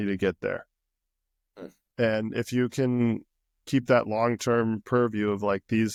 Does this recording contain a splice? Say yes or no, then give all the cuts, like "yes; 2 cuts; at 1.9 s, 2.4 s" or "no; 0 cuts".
no; 0 cuts